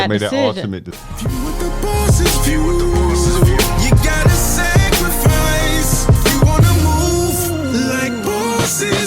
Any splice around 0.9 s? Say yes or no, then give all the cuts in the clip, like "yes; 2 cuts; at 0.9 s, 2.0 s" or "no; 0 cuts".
yes; 1 cut; at 0.9 s